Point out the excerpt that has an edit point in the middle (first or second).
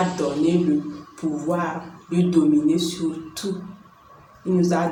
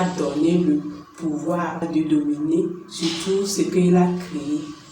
second